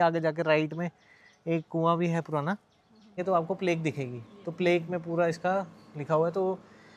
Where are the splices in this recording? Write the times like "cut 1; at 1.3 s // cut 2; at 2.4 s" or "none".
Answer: cut 1; at 3.2 s